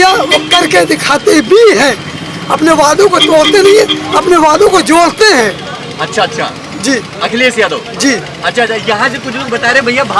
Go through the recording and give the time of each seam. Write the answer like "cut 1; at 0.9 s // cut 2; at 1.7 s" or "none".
none